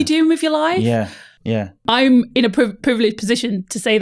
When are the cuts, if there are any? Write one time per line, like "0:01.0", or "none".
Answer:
0:01.8